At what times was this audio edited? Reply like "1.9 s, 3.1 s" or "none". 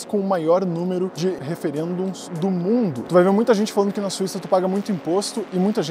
1.3 s, 3.0 s